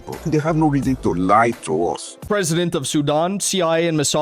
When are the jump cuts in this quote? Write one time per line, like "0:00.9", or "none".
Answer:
0:02.2